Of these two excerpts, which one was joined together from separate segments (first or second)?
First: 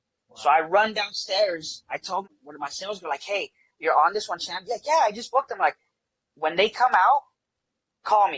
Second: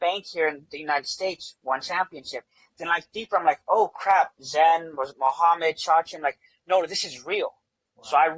first